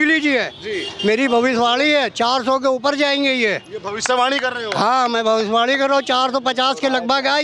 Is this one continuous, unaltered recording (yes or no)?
yes